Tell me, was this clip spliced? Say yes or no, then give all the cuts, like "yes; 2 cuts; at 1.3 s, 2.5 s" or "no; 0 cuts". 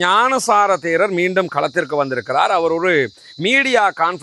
no; 0 cuts